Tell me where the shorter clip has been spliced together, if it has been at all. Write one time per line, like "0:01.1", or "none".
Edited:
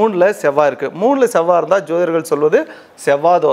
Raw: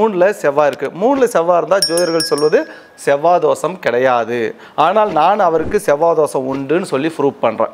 none